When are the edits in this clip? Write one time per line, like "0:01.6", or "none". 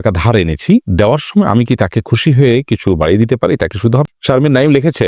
0:04.1